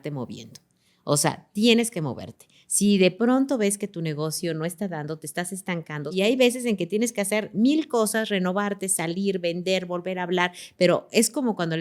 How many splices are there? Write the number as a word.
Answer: one